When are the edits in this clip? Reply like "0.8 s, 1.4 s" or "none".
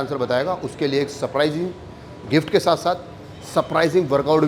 none